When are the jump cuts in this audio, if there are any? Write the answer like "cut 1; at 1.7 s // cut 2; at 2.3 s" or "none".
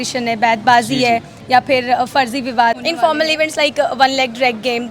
cut 1; at 2.8 s

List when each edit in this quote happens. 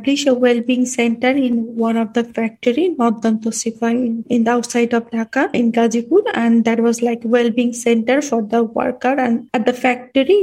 cut 1; at 4.2 s // cut 2; at 5.5 s // cut 3; at 9.5 s

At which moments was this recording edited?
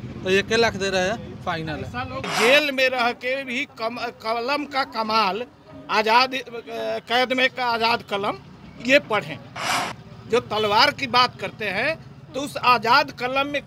cut 1; at 2.2 s

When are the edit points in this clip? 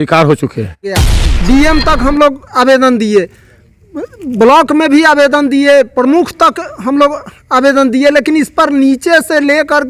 cut 1; at 1.1 s

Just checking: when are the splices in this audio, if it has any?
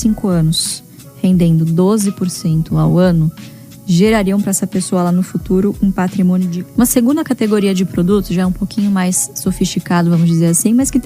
cut 1; at 6.6 s

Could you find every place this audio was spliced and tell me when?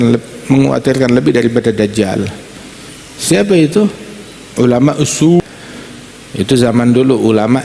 cut 1; at 5.4 s

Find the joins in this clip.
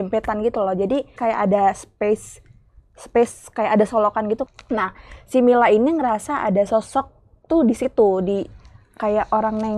cut 1; at 1.2 s // cut 2; at 4.5 s

